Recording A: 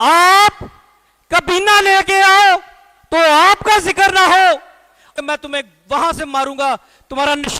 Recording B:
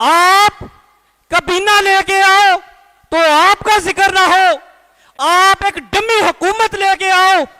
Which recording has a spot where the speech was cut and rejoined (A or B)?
A